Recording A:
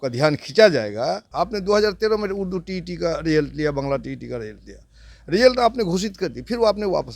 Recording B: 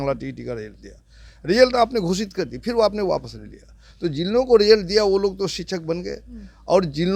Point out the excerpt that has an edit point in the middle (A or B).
A